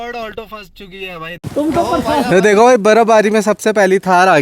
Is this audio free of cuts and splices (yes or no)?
no